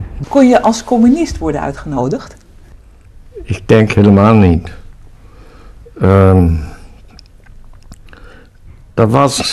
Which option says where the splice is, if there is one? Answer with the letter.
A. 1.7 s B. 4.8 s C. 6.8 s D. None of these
B